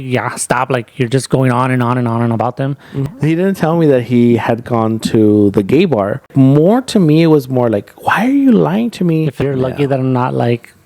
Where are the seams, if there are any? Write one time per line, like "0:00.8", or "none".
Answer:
0:03.0
0:06.3
0:09.4